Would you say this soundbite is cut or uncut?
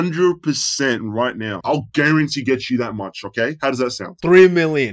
cut